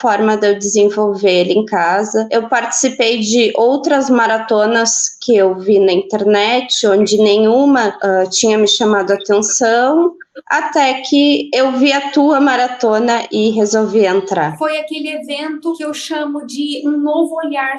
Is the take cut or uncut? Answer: uncut